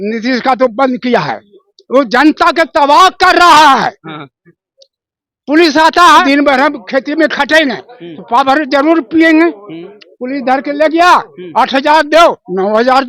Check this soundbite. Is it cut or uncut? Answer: cut